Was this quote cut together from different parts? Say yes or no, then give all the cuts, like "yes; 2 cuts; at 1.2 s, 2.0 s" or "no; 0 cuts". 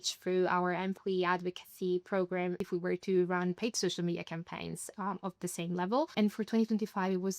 yes; 2 cuts; at 2.6 s, 6.1 s